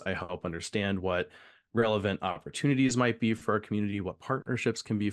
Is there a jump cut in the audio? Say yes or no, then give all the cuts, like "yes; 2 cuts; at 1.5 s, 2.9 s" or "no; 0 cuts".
no; 0 cuts